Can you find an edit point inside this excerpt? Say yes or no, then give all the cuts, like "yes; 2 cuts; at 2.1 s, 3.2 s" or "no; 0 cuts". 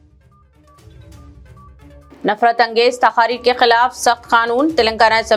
no; 0 cuts